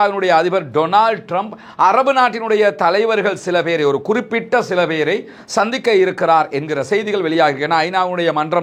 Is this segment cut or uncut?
uncut